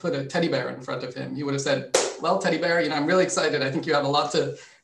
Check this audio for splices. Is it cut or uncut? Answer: uncut